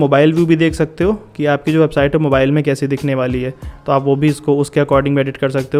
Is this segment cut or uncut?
uncut